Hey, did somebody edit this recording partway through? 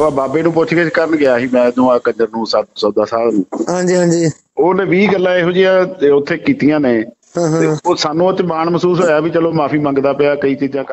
no; 0 cuts

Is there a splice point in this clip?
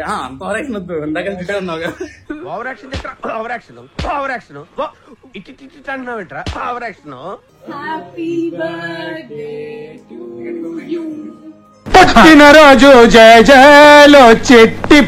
yes; 1 cut; at 7.5 s

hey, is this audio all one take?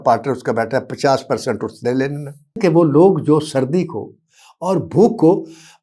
no; 1 cut; at 2.6 s

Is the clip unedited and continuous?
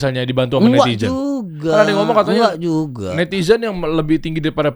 yes; 0 cuts

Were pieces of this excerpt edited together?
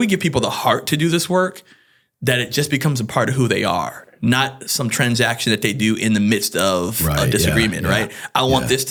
no; 0 cuts

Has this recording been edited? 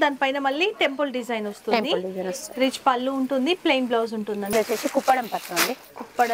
yes; 1 cut; at 4.5 s

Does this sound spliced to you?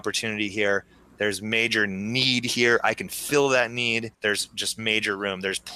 no; 0 cuts

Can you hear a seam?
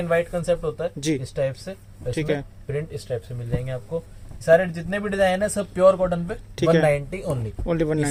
no; 0 cuts

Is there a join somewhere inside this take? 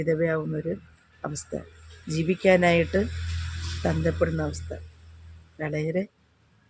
no; 0 cuts

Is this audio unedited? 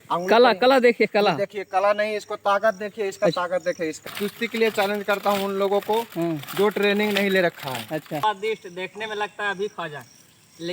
no; 2 cuts; at 4.0 s, 8.2 s

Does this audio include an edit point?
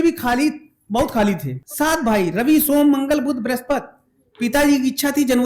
yes; 1 cut; at 1.6 s

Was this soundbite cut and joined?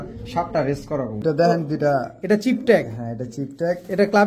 yes; 1 cut; at 1.2 s

